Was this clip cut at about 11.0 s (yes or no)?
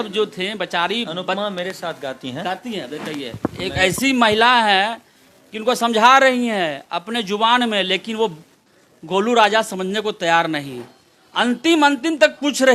no